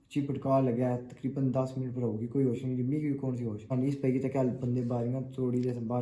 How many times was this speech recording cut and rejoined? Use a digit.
1